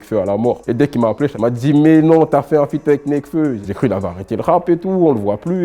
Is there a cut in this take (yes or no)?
yes